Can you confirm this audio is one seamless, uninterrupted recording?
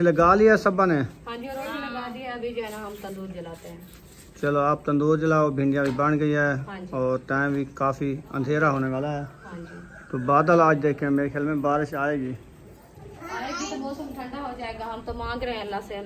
yes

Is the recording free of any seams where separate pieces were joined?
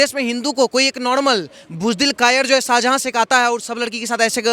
yes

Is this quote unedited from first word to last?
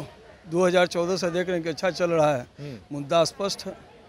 yes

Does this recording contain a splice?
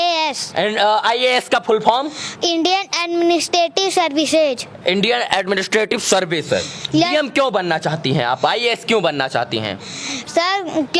no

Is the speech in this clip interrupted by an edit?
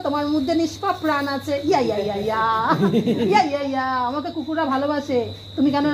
no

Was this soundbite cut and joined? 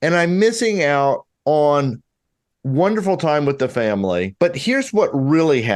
yes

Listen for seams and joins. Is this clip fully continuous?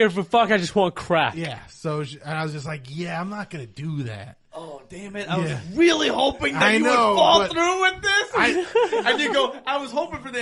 yes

